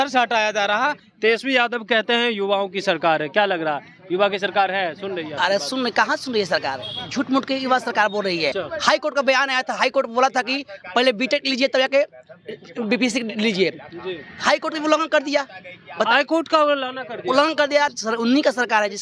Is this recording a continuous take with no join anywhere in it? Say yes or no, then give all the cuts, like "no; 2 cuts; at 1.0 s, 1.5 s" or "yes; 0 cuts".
no; 3 cuts; at 1.0 s, 8.5 s, 17.9 s